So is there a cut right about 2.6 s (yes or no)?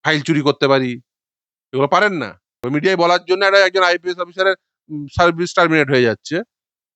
yes